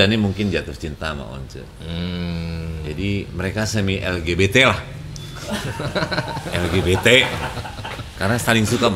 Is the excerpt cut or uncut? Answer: uncut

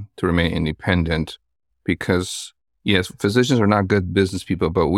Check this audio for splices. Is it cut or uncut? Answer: uncut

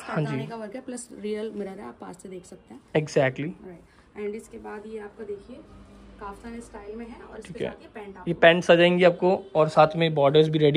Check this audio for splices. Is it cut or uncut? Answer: uncut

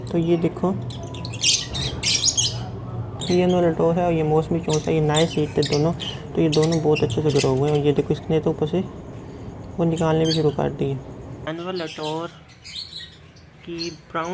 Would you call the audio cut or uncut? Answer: cut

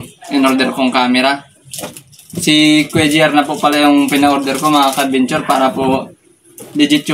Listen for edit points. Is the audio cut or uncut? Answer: uncut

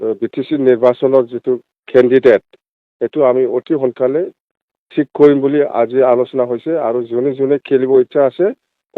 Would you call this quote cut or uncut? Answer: cut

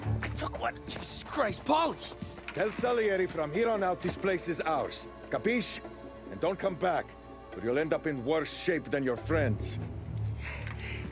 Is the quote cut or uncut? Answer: uncut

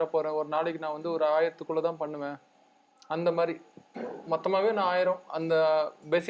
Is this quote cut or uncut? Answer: uncut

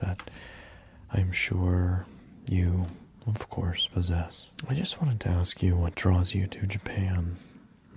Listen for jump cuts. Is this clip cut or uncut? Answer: cut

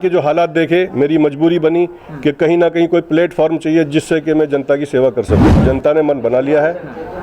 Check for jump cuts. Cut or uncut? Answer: cut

